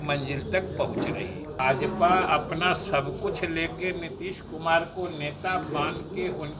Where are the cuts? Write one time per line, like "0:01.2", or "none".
0:01.4